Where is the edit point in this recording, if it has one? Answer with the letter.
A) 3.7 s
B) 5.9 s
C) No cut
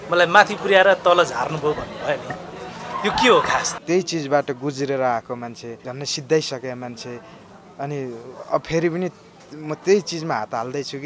A